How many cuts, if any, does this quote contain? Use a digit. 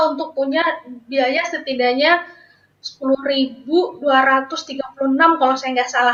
0